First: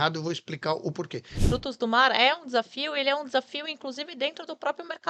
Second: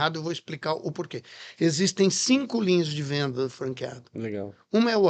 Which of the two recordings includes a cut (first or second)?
first